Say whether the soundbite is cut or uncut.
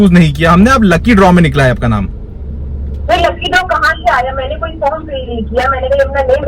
uncut